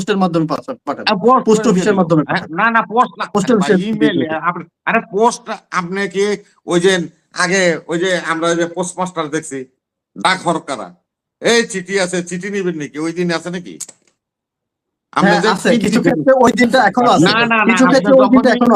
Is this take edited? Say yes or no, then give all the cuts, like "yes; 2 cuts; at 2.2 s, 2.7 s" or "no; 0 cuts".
no; 0 cuts